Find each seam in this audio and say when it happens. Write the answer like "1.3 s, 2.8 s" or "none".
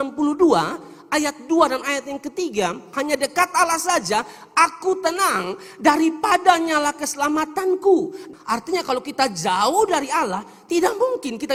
none